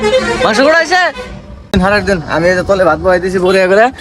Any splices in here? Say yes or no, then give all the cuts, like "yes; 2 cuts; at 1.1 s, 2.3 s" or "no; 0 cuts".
yes; 1 cut; at 1.7 s